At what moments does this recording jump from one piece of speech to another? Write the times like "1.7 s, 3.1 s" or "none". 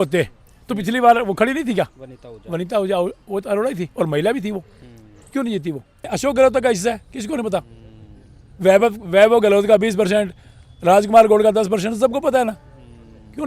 6.1 s